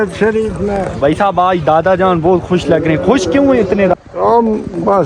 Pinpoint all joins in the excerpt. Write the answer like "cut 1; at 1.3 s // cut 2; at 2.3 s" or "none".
cut 1; at 3.9 s